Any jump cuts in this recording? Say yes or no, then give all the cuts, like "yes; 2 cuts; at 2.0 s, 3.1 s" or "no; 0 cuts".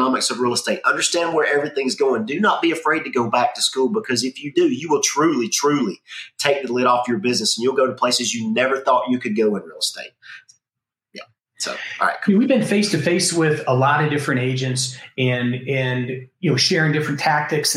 no; 0 cuts